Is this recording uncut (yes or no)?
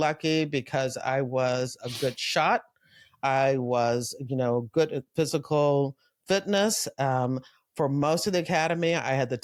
yes